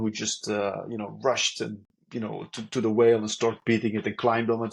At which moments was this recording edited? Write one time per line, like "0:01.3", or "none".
none